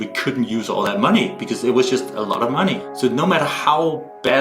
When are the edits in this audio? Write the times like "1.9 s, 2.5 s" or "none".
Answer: 2.9 s